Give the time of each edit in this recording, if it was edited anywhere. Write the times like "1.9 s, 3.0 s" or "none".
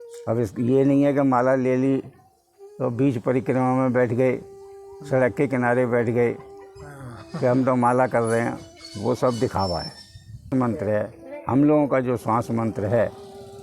10.5 s